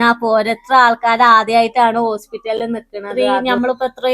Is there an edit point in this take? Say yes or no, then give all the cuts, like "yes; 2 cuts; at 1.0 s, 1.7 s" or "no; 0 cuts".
yes; 1 cut; at 3.2 s